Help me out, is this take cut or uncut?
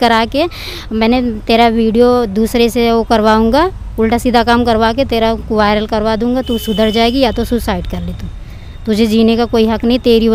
uncut